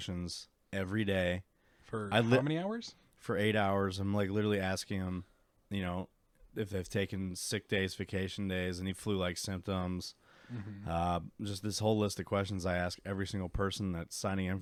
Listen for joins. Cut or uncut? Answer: uncut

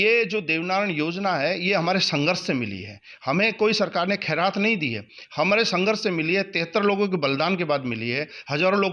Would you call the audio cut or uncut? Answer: uncut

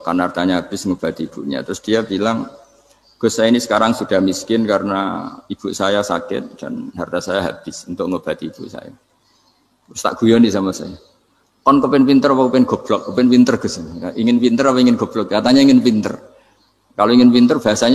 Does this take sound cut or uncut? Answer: uncut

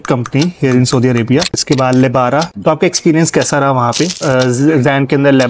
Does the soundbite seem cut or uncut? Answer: cut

